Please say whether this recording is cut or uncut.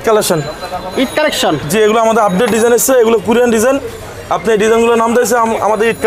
uncut